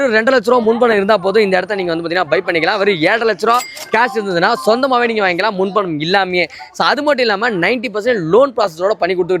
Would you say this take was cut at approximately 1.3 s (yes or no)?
no